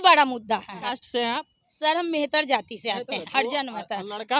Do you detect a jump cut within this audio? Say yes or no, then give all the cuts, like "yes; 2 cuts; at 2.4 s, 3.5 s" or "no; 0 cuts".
yes; 2 cuts; at 0.8 s, 3.2 s